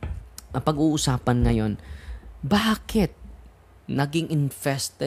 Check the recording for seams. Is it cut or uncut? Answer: uncut